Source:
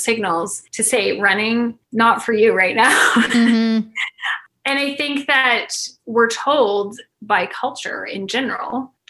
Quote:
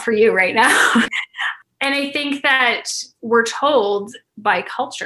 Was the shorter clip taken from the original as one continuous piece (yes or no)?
no